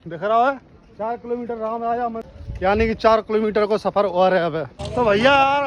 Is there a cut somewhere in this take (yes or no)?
yes